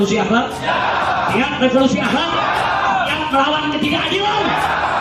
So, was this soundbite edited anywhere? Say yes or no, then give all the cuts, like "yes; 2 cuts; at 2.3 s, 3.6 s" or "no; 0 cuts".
no; 0 cuts